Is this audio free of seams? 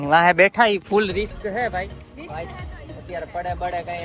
no; 1 cut; at 2.1 s

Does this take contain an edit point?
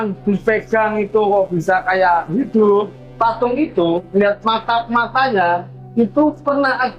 yes; 2 cuts; at 3.0 s, 5.8 s

